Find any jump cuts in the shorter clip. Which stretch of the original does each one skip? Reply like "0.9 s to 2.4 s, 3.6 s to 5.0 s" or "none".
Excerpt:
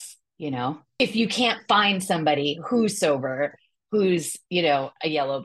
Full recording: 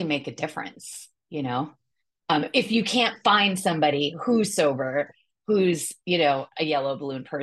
1.9 s to 2.5 s